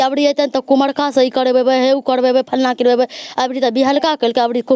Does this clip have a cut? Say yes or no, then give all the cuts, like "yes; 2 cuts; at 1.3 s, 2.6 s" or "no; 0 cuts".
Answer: no; 0 cuts